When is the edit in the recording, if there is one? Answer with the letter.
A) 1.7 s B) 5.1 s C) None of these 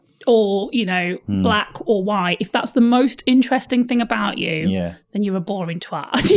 C